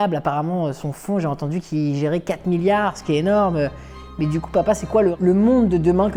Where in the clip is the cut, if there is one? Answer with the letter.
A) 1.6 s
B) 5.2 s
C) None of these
B